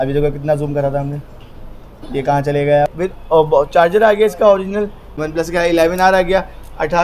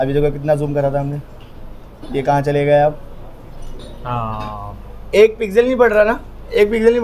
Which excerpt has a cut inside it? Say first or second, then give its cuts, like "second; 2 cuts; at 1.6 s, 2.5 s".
first; 2 cuts; at 2.9 s, 5.1 s